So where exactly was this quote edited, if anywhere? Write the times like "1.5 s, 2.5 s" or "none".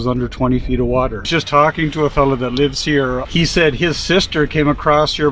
1.3 s, 3.2 s